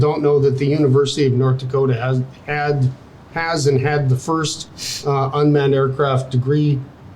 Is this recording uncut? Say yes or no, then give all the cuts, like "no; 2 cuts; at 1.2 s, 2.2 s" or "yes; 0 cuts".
yes; 0 cuts